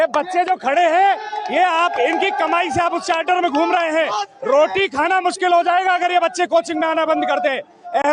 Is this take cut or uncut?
uncut